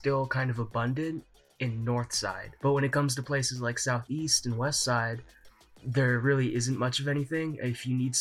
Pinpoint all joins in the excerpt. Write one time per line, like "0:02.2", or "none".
0:02.5